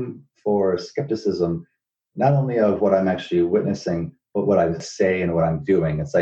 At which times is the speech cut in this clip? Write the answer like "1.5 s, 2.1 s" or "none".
4.8 s